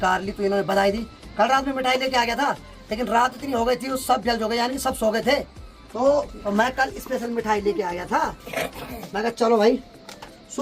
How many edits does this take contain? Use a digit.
0